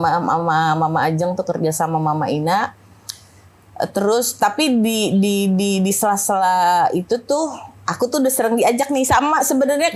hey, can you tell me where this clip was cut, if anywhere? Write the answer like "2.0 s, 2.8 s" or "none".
none